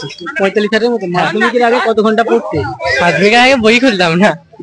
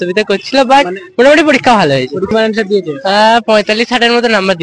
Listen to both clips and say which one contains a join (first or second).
second